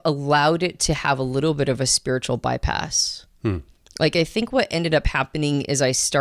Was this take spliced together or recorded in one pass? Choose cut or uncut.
uncut